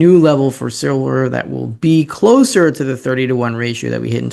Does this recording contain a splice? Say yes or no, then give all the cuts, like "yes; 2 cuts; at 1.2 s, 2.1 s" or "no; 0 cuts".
no; 0 cuts